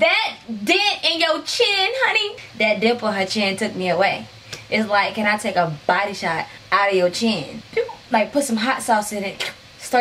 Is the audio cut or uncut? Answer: cut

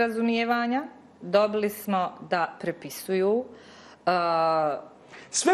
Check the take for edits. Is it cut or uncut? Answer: uncut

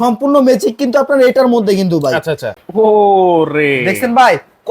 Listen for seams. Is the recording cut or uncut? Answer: cut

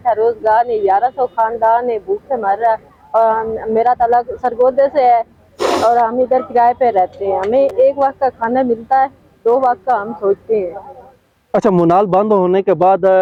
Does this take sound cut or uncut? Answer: uncut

